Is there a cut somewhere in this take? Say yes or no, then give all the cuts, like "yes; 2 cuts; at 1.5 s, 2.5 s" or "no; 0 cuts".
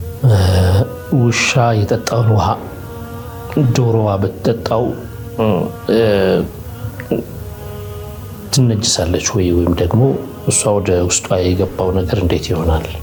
no; 0 cuts